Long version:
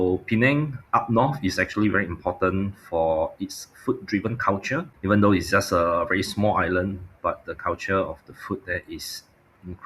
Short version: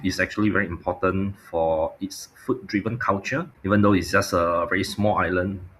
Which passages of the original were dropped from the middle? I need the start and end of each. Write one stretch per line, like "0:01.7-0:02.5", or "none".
none